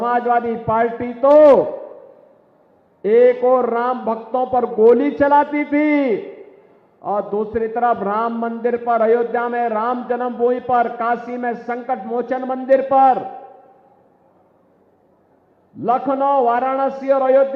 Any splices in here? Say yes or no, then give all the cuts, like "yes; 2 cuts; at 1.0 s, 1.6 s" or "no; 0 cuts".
no; 0 cuts